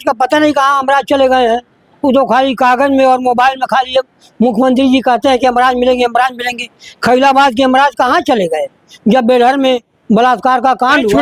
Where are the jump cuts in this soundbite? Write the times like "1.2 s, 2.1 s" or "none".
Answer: none